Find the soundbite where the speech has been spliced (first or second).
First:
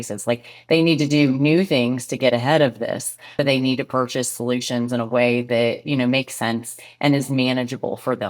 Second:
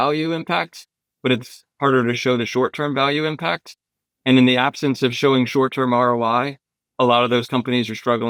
first